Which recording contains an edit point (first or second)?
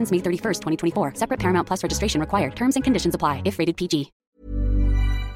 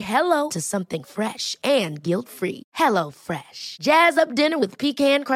first